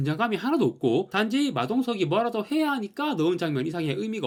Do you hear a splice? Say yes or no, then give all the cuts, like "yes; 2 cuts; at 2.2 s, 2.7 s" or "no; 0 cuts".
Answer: no; 0 cuts